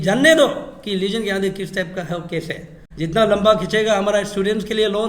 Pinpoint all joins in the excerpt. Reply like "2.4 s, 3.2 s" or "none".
2.8 s